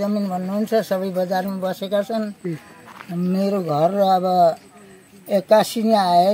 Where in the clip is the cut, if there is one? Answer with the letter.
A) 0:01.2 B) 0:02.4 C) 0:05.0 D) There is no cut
D